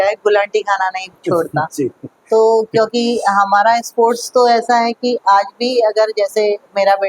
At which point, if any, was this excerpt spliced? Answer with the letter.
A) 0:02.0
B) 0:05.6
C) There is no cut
C